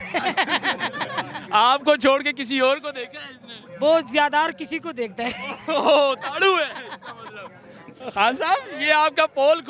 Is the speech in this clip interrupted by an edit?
no; 0 cuts

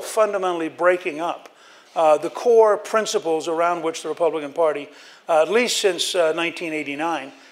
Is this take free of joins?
yes; 0 cuts

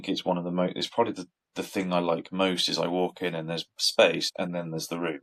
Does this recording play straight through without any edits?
yes; 0 cuts

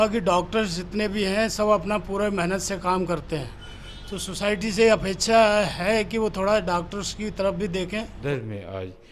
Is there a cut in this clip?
yes; 1 cut; at 8.2 s

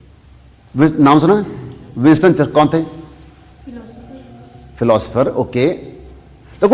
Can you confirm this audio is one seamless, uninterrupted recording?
yes; 0 cuts

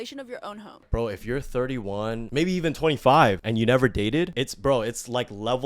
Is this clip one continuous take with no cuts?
no; 4 cuts; at 0.9 s, 2.2 s, 3.4 s, 4.3 s

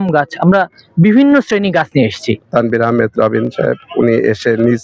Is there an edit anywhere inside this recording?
yes; 1 cut; at 2.4 s

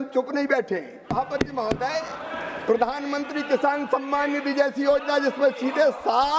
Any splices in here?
yes; 1 cut; at 1.1 s

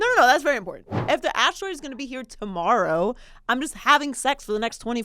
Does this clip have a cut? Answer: yes; 1 cut; at 1.0 s

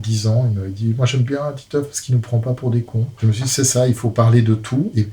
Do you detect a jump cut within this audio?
yes; 1 cut; at 3.2 s

